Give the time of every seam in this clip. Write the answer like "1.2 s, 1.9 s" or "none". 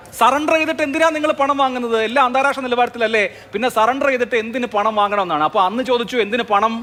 none